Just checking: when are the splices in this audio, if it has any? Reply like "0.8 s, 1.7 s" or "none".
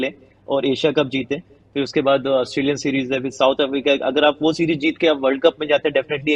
none